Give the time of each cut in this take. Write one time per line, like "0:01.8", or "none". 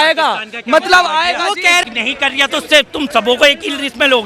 0:01.7